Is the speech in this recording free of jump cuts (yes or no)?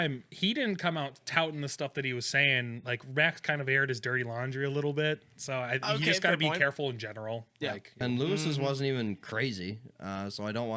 no